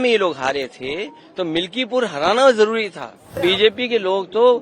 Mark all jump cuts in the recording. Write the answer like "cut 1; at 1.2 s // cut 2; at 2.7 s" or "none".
cut 1; at 3.4 s